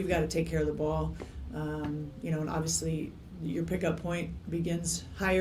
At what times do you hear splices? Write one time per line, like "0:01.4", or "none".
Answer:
none